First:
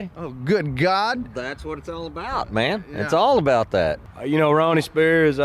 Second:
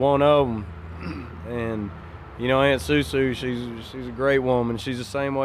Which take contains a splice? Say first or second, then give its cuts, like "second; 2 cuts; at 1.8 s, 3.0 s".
first; 1 cut; at 4.0 s